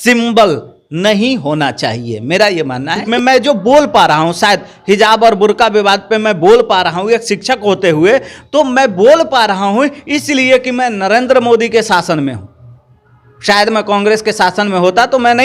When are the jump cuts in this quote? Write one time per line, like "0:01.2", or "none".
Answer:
0:03.0